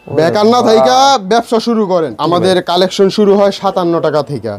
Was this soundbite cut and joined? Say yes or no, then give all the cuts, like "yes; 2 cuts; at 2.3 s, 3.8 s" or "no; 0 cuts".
yes; 1 cut; at 2.2 s